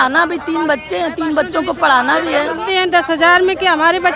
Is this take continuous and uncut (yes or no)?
no